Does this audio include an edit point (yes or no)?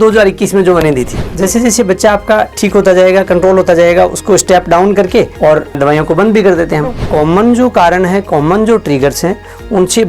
yes